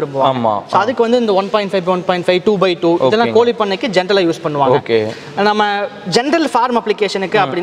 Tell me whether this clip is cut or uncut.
uncut